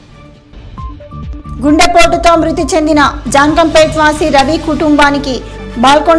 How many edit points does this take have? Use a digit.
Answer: 1